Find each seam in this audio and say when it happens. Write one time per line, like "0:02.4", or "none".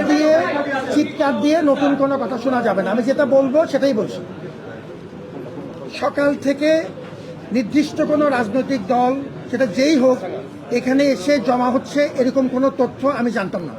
none